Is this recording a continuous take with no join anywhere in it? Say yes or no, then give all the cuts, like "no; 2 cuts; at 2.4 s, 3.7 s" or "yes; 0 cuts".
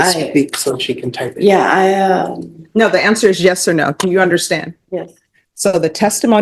no; 1 cut; at 5.4 s